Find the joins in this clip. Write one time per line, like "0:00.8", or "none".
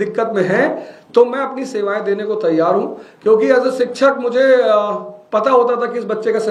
none